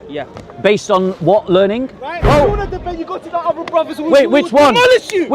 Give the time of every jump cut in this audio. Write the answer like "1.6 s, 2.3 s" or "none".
2.2 s